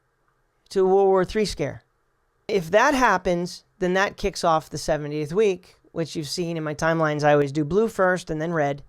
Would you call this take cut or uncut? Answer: cut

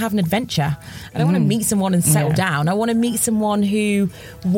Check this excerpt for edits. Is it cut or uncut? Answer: uncut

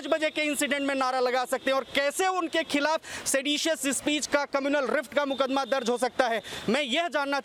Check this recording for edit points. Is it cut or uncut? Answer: uncut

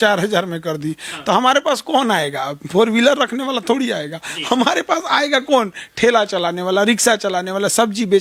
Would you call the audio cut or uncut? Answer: uncut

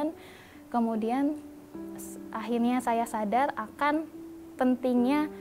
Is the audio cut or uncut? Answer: uncut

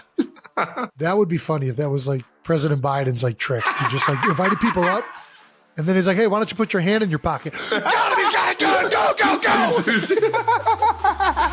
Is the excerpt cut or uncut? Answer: cut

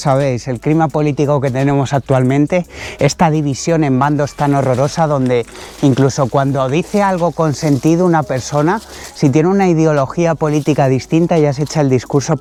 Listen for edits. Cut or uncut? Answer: uncut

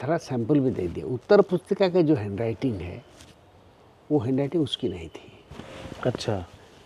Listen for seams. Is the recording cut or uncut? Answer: uncut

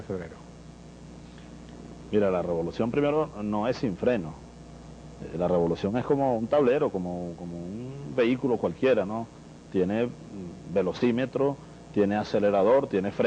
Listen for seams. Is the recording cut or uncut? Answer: uncut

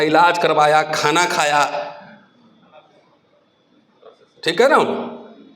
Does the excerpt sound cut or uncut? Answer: uncut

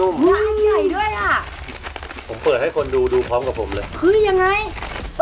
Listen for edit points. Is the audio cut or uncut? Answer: uncut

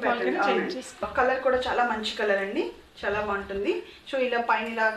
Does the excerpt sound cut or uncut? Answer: cut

